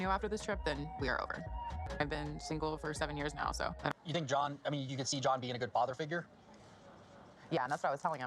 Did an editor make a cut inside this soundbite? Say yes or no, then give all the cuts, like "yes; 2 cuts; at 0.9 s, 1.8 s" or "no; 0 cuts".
yes; 1 cut; at 4.3 s